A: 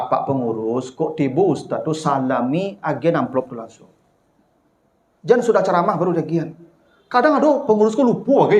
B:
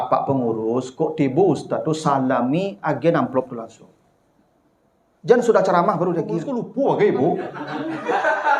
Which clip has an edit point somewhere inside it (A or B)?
B